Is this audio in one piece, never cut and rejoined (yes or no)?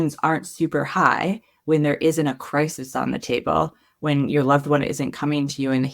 yes